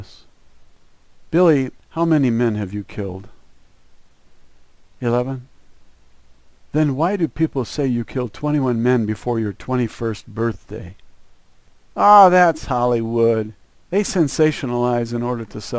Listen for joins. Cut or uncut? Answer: cut